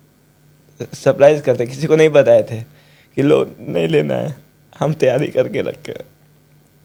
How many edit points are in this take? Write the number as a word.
zero